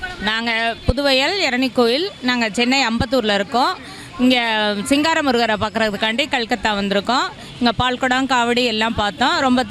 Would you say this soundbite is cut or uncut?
uncut